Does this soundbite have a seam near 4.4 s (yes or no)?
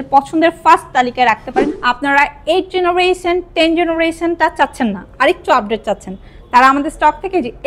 no